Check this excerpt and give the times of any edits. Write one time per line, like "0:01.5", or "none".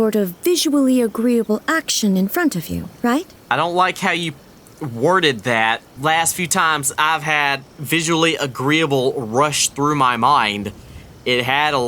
0:03.4
0:05.9